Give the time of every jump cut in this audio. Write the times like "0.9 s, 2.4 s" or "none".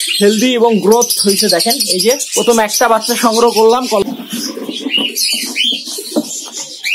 4.0 s